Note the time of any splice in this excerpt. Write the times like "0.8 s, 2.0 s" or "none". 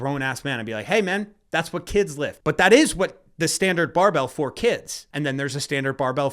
2.4 s, 5.0 s